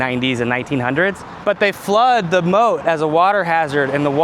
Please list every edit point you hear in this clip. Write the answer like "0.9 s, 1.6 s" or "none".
1.3 s